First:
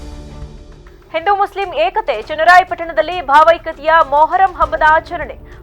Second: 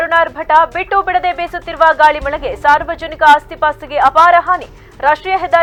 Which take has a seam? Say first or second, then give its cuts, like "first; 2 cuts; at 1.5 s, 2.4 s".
first; 1 cut; at 0.9 s